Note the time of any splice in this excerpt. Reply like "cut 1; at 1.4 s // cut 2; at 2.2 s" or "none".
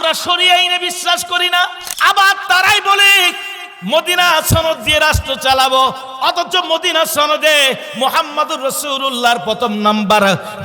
cut 1; at 1.8 s